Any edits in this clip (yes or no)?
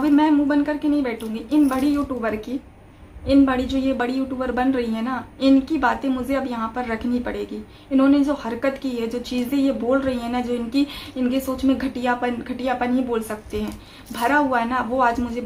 no